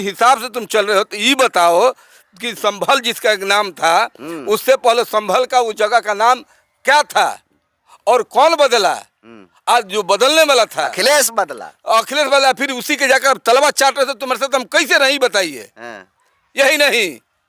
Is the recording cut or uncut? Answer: uncut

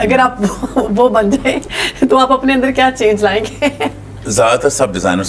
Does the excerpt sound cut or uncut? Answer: cut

